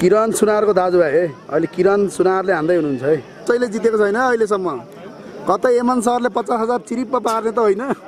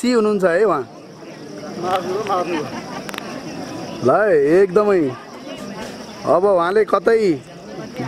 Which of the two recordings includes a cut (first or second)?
first